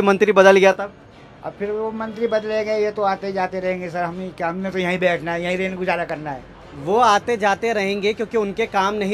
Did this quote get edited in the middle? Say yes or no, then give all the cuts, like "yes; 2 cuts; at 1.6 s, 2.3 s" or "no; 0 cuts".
no; 0 cuts